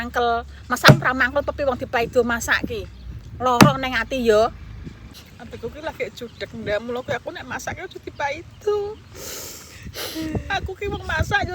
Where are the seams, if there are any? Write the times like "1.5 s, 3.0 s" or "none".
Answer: 5.2 s